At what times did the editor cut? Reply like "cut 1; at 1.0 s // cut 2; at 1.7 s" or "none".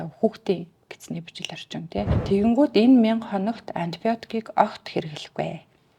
cut 1; at 2.2 s